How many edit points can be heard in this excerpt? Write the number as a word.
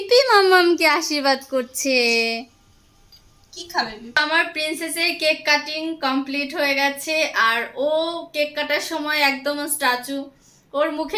one